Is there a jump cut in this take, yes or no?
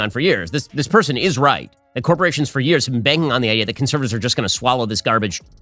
no